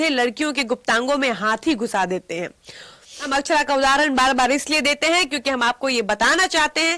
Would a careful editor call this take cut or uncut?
cut